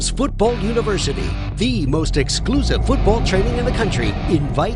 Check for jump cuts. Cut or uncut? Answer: uncut